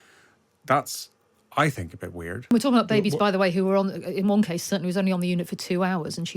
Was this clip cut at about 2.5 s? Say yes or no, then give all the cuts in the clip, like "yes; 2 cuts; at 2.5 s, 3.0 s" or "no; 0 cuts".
yes; 1 cut; at 2.5 s